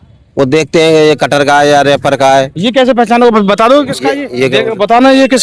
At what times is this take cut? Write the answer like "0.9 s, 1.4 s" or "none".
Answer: none